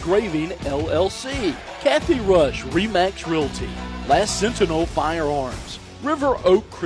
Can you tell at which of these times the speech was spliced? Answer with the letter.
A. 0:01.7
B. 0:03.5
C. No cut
A